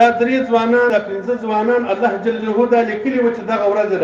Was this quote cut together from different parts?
yes; 1 cut; at 0.9 s

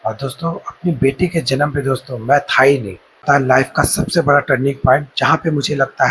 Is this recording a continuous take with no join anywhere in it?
no; 1 cut; at 3.2 s

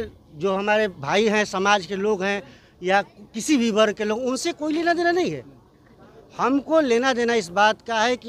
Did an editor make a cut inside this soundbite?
no; 0 cuts

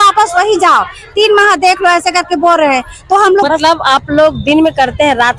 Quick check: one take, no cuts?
no; 1 cut; at 3.5 s

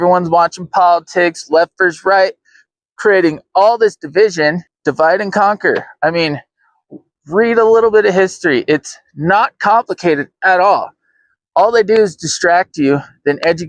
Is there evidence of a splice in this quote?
yes; 1 cut; at 4.7 s

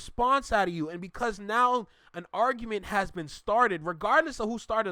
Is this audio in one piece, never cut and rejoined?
yes; 0 cuts

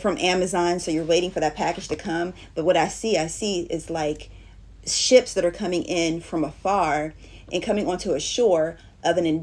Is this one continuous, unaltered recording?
yes; 0 cuts

